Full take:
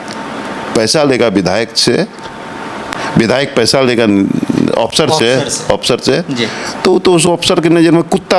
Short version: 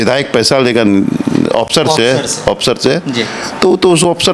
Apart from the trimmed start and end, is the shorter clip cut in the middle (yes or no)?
no